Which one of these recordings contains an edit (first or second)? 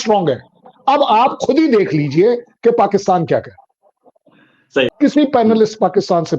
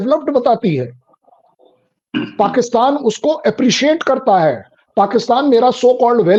first